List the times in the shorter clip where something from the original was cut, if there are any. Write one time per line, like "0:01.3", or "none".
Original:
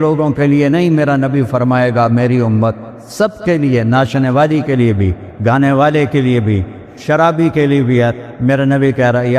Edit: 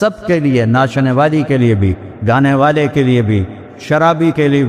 none